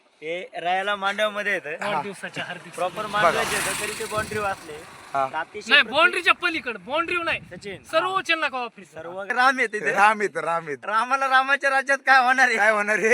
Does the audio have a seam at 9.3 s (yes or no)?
yes